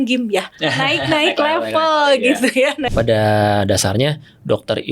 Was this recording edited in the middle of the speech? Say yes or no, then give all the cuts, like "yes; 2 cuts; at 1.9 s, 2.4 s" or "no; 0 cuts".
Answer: yes; 1 cut; at 2.8 s